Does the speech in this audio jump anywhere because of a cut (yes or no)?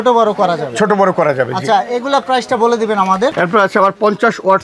yes